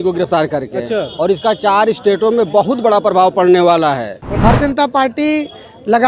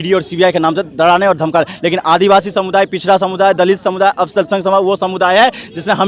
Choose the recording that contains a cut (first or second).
first